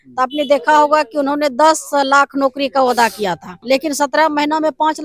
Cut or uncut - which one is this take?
cut